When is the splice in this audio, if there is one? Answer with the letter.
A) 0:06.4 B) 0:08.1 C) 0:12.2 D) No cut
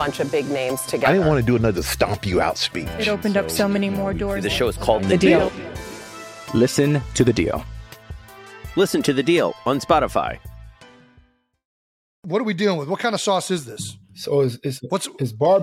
C